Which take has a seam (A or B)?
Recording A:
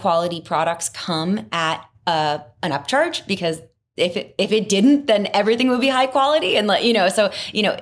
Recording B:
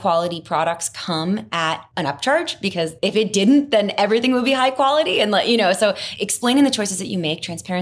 B